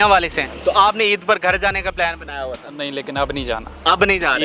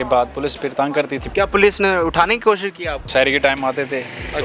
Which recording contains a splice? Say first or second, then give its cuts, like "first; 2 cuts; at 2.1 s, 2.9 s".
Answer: second; 2 cuts; at 1.2 s, 3.1 s